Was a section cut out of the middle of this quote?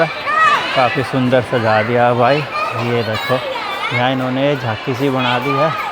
no; 0 cuts

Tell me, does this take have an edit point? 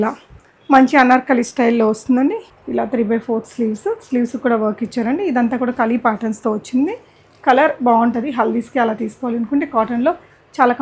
yes; 1 cut; at 2.5 s

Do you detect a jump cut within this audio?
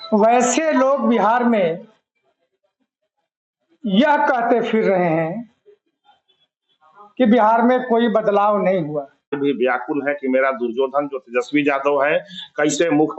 yes; 1 cut; at 9.2 s

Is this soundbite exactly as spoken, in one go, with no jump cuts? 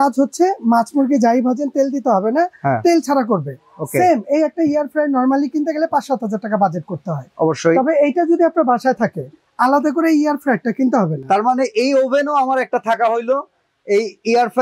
yes; 0 cuts

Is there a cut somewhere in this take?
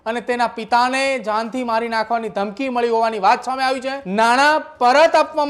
yes; 1 cut; at 4.0 s

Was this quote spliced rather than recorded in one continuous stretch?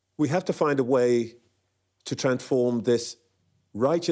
no; 0 cuts

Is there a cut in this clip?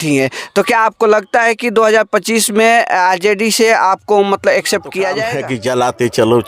yes; 1 cut; at 5.3 s

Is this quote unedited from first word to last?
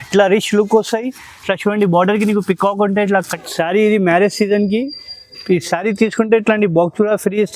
no; 1 cut; at 3.3 s

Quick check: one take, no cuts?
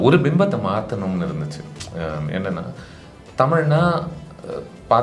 yes; 0 cuts

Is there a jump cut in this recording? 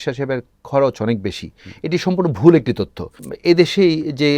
yes; 1 cut; at 3.2 s

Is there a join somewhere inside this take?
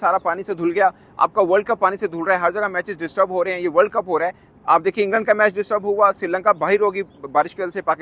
no; 0 cuts

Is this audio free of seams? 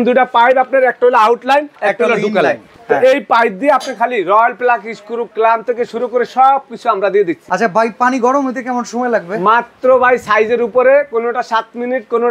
no; 3 cuts; at 1.7 s, 2.7 s, 7.4 s

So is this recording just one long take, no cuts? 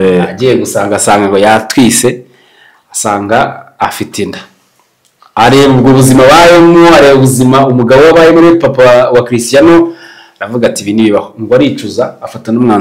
yes; 0 cuts

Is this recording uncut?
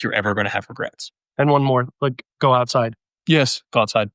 no; 1 cut; at 1.1 s

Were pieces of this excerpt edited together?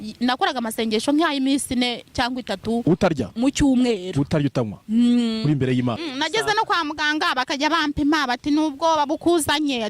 yes; 1 cut; at 6.1 s

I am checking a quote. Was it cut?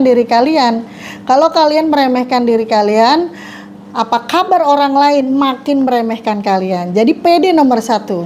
no; 0 cuts

